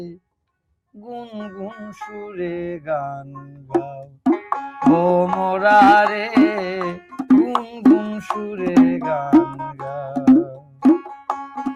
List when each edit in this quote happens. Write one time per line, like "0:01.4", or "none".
none